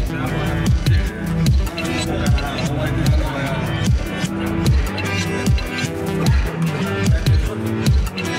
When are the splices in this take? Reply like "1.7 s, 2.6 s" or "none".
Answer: 4.8 s